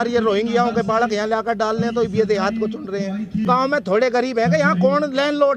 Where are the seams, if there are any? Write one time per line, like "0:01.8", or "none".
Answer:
0:03.4